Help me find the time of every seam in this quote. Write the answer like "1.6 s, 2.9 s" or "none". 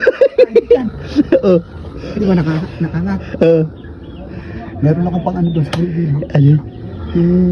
none